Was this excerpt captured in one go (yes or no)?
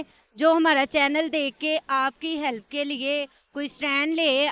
yes